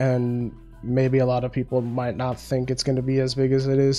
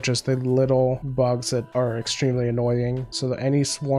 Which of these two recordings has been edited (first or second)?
second